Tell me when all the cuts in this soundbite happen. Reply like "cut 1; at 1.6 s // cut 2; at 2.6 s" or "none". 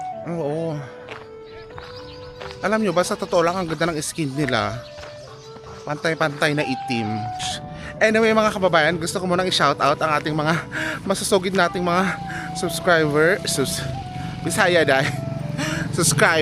cut 1; at 7.3 s